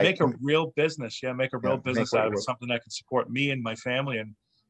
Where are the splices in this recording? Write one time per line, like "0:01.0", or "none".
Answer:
none